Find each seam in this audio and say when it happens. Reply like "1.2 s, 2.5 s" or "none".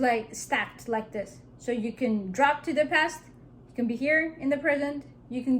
none